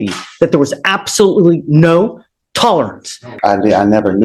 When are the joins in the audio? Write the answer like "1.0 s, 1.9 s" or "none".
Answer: 3.3 s